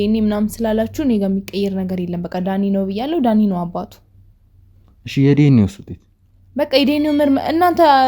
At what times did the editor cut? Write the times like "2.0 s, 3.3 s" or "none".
none